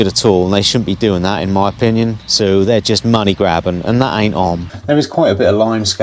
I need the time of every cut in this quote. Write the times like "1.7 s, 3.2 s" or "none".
2.2 s, 4.7 s